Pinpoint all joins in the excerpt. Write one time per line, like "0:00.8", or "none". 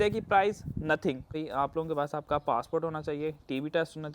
0:01.4